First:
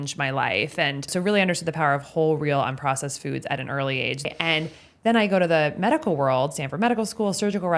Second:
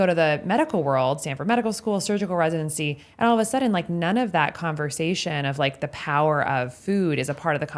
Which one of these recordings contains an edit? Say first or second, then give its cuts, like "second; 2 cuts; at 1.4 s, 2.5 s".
first; 2 cuts; at 1.1 s, 4.2 s